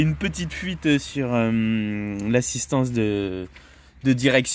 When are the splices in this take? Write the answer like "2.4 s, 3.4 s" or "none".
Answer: none